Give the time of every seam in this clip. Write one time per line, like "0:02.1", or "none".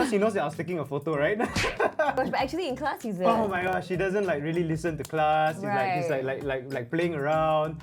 none